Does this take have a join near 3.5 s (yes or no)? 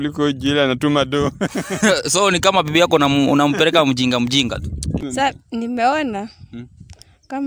no